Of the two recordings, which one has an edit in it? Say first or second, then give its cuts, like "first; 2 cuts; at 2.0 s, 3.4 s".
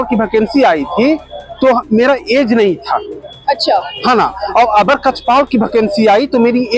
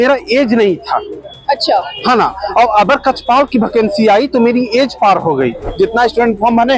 second; 1 cut; at 5.7 s